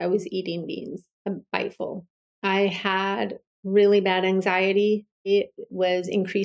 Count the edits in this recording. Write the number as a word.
three